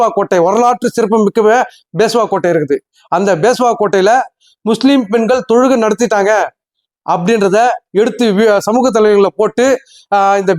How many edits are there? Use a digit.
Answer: 0